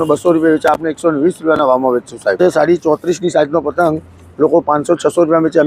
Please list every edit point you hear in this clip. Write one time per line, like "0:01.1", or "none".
0:02.4